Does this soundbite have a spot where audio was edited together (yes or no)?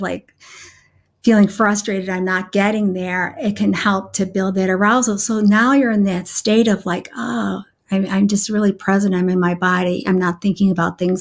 no